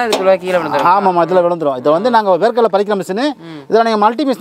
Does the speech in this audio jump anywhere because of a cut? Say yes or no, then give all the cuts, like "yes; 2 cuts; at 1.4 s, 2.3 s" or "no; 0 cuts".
no; 0 cuts